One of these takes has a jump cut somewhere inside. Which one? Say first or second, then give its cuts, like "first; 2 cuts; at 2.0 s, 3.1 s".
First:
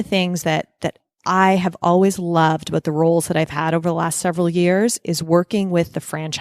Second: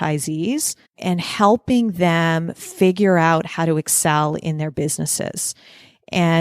second; 1 cut; at 1.0 s